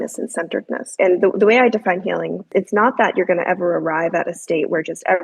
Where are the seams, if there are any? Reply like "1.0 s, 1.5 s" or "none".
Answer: 1.0 s, 2.5 s